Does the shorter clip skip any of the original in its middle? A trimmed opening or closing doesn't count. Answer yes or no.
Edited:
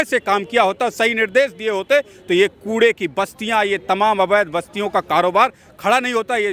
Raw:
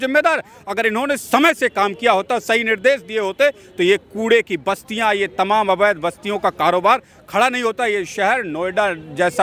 no